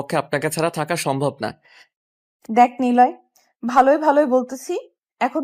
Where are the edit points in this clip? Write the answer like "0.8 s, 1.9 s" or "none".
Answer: none

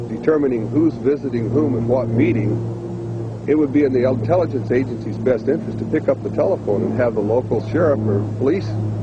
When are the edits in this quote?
7.7 s

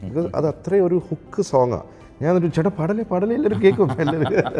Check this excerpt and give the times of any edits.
none

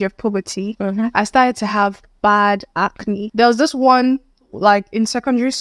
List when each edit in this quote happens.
3.3 s

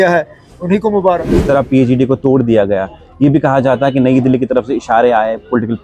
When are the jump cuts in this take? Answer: 1.3 s

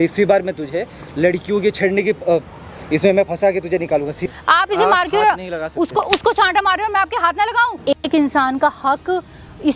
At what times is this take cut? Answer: 4.2 s, 7.8 s

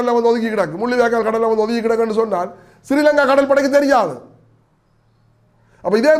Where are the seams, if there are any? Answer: none

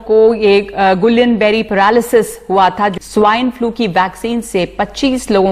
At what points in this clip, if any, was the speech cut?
2.9 s

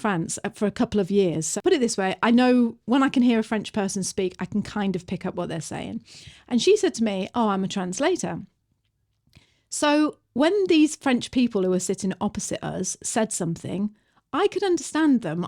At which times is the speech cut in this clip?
1.5 s

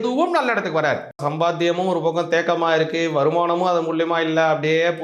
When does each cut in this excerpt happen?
1.2 s

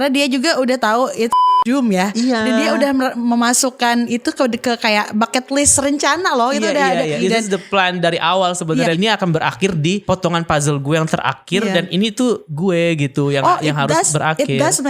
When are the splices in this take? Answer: 3.1 s, 7.2 s, 8.9 s, 10.0 s, 12.5 s

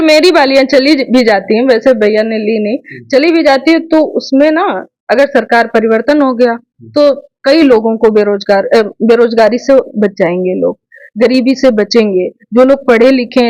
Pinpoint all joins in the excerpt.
none

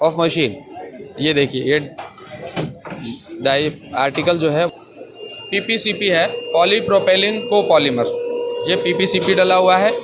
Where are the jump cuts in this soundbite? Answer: 4.7 s

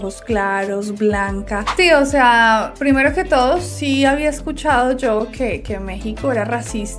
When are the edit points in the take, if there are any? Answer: 1.7 s

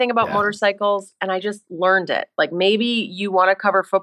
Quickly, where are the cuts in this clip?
2.3 s

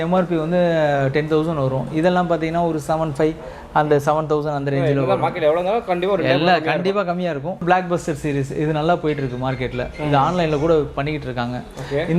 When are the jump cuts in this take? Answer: 7.6 s

